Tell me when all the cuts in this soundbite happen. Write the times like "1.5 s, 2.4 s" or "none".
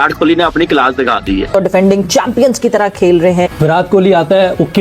1.5 s, 3.5 s